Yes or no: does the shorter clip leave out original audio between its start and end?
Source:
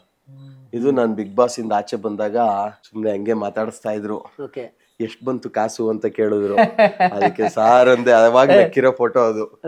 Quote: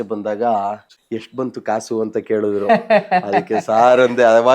yes